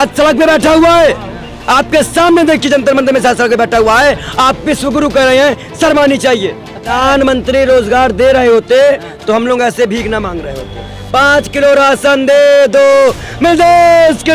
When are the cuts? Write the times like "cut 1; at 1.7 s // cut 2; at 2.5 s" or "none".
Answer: cut 1; at 6.9 s